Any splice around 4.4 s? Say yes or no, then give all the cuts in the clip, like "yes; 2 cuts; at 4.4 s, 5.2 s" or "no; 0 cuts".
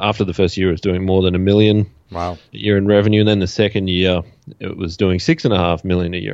no; 1 cut; at 2.5 s